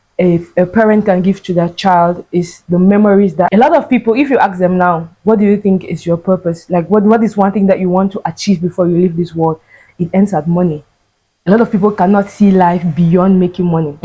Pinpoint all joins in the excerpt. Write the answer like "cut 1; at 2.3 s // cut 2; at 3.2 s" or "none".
cut 1; at 3.5 s